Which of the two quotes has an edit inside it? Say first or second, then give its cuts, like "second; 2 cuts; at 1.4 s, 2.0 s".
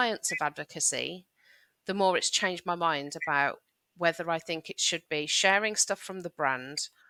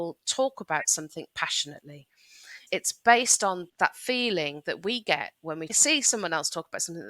second; 2 cuts; at 2.6 s, 5.7 s